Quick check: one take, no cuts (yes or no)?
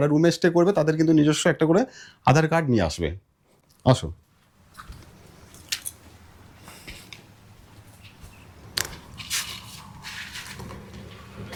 yes